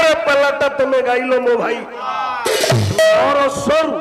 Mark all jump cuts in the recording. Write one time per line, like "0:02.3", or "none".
0:02.0